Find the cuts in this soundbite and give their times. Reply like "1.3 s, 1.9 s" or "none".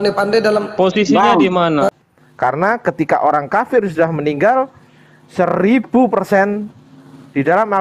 1.9 s